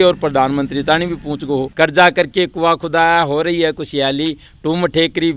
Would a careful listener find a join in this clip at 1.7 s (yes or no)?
yes